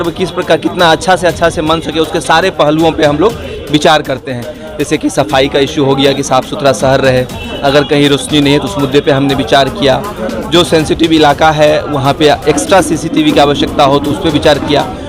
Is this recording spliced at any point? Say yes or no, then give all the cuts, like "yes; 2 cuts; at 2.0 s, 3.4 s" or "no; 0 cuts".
no; 0 cuts